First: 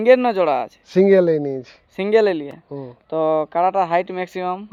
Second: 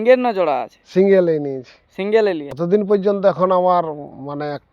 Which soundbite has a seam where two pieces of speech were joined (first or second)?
second